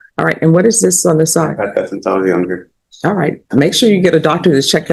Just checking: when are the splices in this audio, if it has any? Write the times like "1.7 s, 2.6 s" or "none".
none